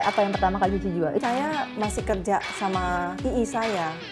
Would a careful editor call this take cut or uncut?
cut